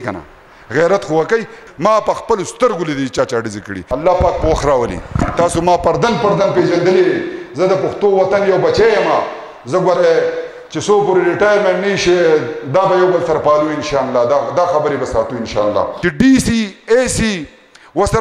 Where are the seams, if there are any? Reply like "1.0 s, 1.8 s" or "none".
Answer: 1.6 s, 3.8 s, 15.9 s